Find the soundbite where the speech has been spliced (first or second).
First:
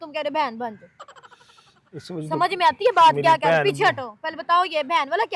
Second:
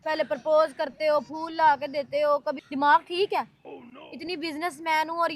second